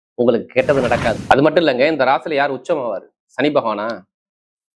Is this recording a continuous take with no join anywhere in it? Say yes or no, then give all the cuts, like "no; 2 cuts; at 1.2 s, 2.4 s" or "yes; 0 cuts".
no; 1 cut; at 1.2 s